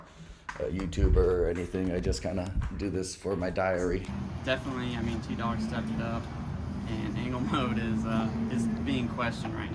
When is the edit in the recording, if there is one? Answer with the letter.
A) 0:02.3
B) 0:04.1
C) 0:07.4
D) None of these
B